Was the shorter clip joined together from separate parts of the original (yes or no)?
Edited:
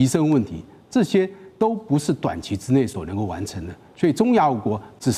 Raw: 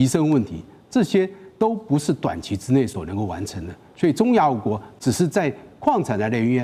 no